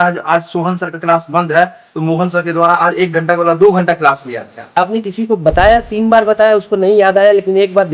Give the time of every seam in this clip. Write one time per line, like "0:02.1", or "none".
0:04.8